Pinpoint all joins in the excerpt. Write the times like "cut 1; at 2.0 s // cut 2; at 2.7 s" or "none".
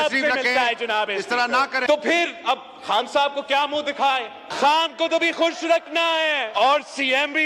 cut 1; at 1.8 s // cut 2; at 4.4 s // cut 3; at 6.5 s